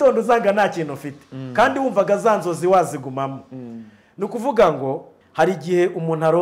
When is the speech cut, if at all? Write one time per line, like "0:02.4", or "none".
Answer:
0:05.1